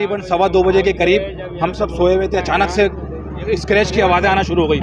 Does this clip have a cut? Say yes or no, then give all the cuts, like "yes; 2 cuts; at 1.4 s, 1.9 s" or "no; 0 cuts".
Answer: no; 0 cuts